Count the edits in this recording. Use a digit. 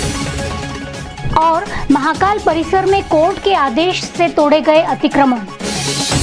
1